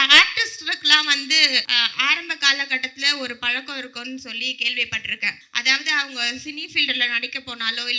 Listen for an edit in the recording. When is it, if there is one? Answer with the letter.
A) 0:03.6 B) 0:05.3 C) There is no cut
C